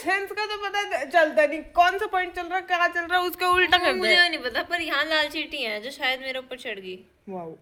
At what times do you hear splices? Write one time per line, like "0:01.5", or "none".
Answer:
none